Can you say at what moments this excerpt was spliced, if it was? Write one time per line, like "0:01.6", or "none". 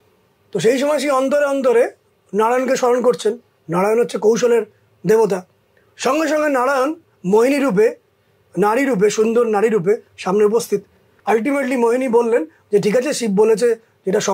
0:11.1